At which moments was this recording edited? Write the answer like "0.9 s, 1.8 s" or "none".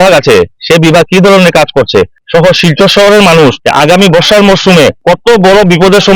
2.2 s, 3.6 s, 5.0 s

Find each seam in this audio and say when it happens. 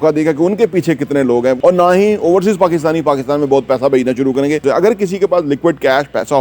1.6 s, 4.6 s

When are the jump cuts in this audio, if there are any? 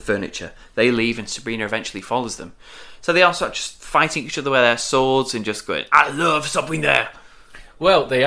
none

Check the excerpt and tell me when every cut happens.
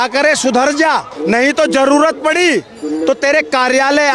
none

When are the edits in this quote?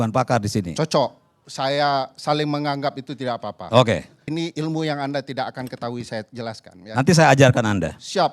4.2 s

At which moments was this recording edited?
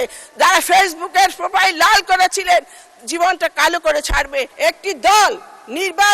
4.5 s

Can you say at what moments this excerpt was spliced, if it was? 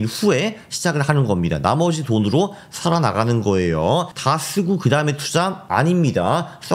5.6 s

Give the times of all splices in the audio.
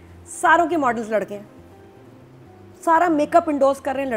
none

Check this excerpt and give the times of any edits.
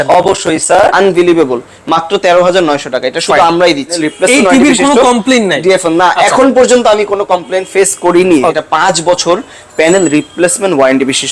0.9 s, 4.0 s, 8.5 s

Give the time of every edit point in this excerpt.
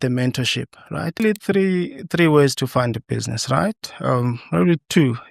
1.2 s

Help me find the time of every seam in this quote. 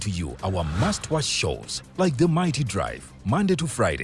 none

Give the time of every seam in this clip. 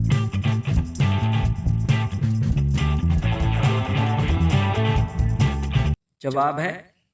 6.1 s

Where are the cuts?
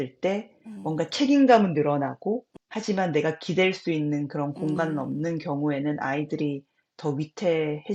2.6 s

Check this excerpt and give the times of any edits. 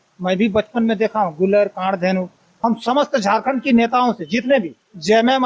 2.4 s

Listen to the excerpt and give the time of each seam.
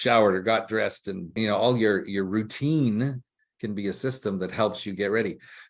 1.3 s

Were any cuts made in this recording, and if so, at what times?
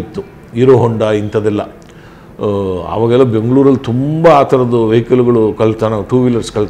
none

